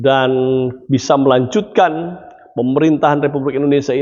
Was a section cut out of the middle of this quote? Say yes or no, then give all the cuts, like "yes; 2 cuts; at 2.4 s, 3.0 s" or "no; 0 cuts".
no; 0 cuts